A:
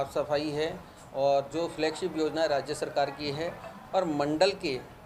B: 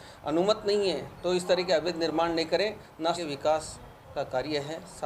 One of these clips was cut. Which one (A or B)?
B